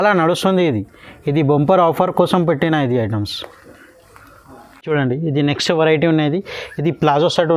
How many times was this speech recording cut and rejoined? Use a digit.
0